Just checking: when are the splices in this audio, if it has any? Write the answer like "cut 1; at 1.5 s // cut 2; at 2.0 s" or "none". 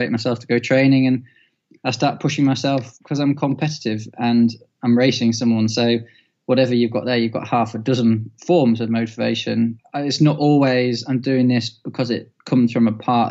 cut 1; at 9.8 s